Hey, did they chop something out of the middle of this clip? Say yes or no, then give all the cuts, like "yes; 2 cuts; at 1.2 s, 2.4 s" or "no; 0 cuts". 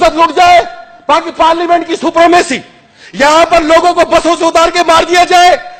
no; 0 cuts